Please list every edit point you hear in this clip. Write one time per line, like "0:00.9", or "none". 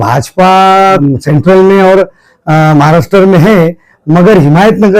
0:01.0